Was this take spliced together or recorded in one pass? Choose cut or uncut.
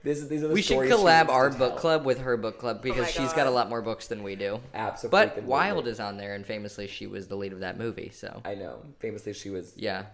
uncut